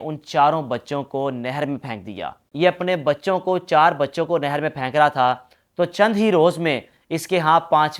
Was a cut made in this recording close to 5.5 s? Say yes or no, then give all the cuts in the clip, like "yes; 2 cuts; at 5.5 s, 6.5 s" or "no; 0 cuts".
no; 1 cut; at 2.4 s